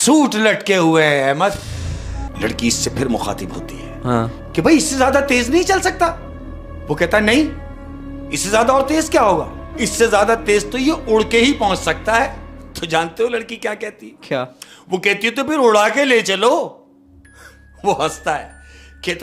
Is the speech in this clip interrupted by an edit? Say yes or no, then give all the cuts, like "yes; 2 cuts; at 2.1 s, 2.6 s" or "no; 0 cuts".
yes; 1 cut; at 2.2 s